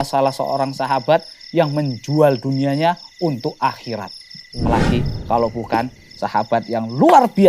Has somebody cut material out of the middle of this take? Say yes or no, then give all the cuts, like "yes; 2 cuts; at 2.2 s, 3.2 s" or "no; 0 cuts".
yes; 1 cut; at 4.7 s